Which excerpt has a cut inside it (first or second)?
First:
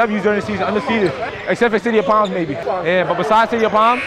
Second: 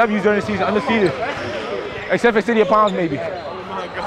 first